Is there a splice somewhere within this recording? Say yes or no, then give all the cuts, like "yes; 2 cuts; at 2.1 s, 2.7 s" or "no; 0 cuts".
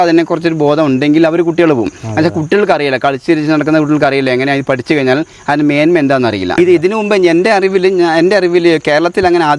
yes; 1 cut; at 6.6 s